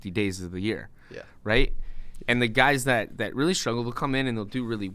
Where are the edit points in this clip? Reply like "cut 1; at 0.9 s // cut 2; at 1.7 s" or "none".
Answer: none